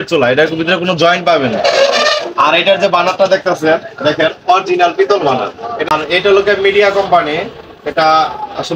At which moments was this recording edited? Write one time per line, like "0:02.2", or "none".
0:05.9